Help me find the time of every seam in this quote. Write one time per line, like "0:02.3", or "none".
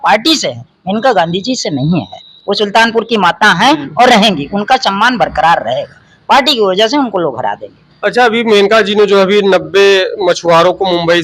none